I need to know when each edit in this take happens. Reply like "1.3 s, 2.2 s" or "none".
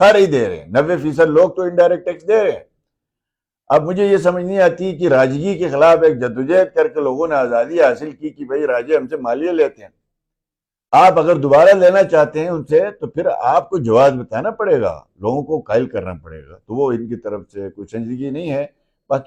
none